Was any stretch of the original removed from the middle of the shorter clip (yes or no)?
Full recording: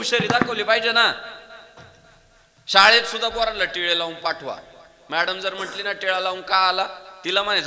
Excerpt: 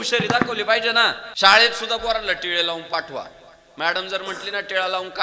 yes